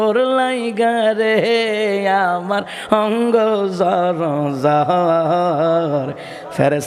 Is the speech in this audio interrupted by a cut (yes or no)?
no